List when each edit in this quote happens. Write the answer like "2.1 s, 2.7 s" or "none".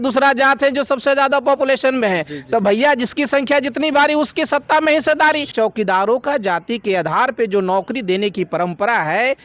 5.5 s